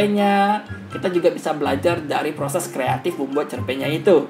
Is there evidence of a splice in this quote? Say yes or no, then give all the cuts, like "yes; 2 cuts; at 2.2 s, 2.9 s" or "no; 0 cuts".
no; 0 cuts